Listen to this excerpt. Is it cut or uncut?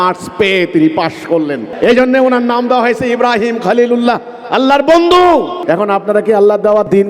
cut